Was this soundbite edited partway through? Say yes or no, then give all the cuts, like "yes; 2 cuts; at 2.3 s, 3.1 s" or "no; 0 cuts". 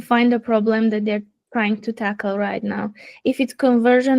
no; 0 cuts